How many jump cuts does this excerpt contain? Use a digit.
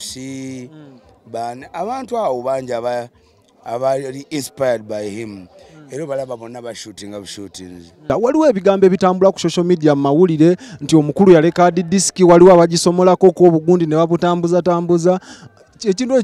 1